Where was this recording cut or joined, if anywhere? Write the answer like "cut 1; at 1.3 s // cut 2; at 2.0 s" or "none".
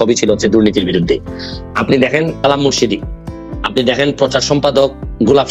cut 1; at 2.4 s